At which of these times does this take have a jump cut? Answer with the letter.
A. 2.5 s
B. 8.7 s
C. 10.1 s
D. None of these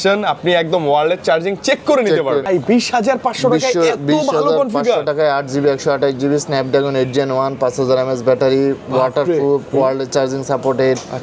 A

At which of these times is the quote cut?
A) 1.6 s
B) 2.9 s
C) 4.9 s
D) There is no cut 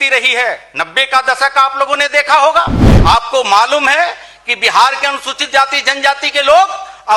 B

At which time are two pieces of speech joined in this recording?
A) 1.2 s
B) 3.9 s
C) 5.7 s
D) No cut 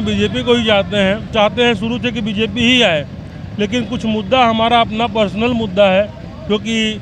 A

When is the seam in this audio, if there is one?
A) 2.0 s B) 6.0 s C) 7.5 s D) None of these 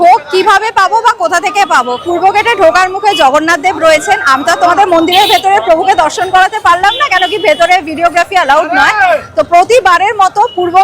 A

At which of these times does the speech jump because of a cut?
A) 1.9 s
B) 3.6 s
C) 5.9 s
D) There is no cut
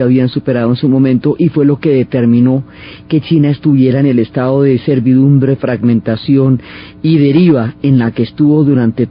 A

